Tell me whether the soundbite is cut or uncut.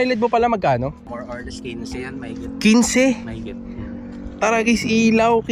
uncut